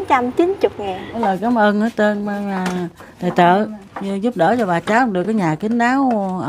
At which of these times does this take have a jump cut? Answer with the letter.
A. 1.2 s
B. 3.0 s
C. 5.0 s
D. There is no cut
A